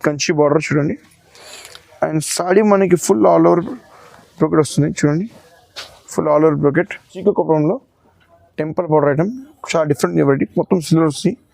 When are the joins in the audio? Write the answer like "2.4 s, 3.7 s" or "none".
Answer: 7.1 s